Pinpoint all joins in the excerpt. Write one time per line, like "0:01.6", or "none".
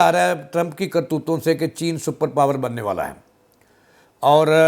none